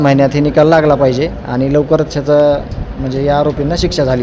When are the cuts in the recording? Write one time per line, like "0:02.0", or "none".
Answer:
none